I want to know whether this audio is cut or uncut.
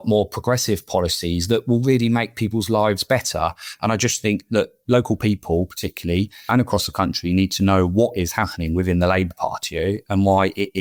uncut